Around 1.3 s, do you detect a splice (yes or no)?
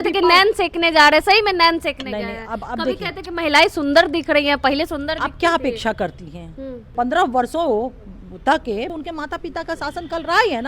no